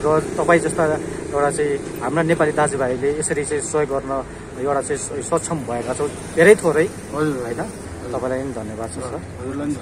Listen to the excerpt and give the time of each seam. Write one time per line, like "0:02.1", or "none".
0:07.9